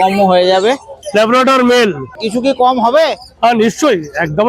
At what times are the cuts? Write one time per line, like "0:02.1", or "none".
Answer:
0:00.9
0:02.2

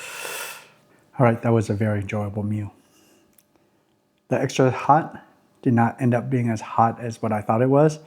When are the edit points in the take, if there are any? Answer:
0:01.0

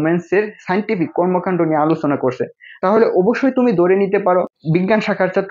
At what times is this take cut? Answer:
0:04.6

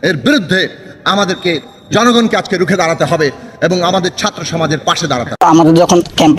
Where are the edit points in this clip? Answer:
0:05.4

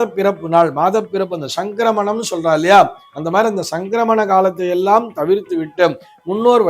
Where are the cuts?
none

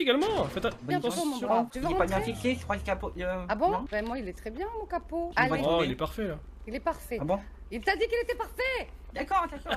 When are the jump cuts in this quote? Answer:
0:01.7
0:05.3

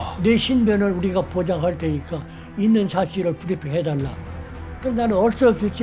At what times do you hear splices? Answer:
none

